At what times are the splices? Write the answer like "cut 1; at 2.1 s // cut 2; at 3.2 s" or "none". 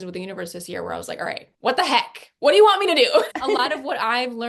cut 1; at 3.3 s